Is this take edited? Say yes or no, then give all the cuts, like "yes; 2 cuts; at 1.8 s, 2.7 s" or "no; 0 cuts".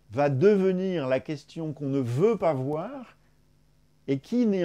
no; 0 cuts